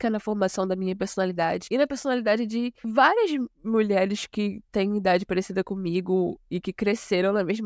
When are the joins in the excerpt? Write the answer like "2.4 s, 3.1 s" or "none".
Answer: 1.6 s, 2.8 s

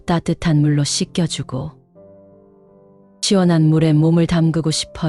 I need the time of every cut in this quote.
none

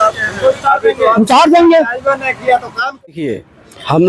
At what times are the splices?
3.2 s

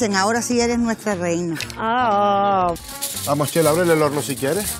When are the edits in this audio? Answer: 2.8 s

